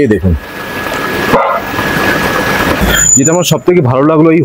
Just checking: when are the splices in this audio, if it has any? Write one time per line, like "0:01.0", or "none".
none

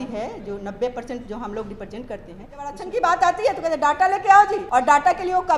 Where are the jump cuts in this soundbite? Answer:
0:02.8
0:04.6

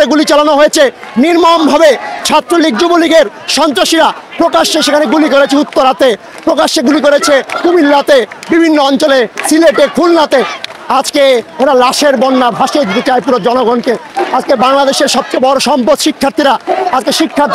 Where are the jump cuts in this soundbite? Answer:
none

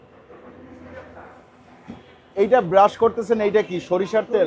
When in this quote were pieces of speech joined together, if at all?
none

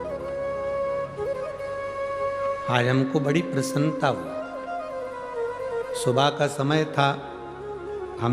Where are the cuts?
none

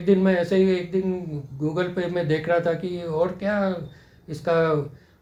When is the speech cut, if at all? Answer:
none

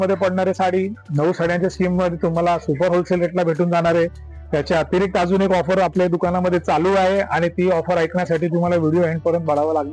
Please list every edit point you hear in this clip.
none

